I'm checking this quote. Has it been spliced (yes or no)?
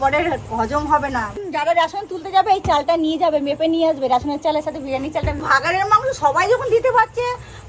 yes